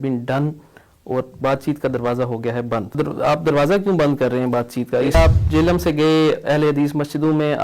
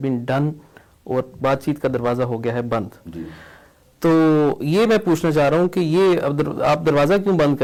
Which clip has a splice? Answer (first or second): first